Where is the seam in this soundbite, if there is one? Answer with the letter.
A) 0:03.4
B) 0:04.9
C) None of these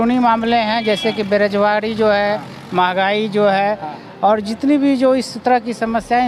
C